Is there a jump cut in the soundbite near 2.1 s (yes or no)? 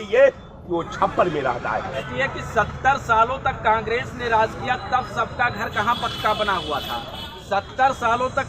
yes